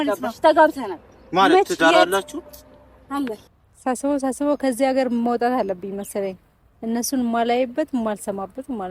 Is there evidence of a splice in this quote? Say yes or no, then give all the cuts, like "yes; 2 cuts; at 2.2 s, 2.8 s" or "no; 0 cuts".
yes; 1 cut; at 3.5 s